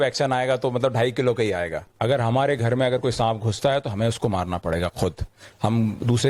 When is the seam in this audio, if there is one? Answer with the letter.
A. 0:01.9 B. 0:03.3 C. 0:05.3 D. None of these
A